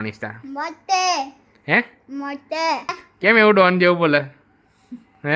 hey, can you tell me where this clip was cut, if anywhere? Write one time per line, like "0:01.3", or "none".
0:03.0